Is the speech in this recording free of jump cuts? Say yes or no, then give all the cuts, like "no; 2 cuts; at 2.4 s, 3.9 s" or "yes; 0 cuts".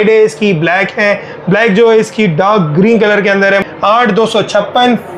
no; 1 cut; at 3.6 s